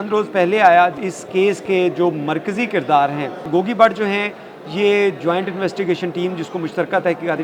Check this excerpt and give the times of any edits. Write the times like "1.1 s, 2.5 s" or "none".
1.0 s, 3.5 s